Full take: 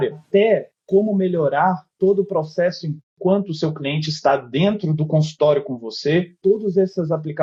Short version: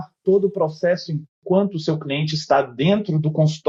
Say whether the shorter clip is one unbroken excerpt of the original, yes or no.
yes